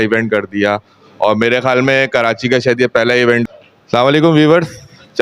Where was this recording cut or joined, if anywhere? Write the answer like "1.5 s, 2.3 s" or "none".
3.4 s